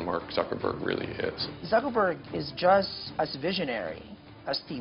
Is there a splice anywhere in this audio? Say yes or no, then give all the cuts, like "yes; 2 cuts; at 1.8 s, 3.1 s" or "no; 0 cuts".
yes; 2 cuts; at 1.5 s, 3.0 s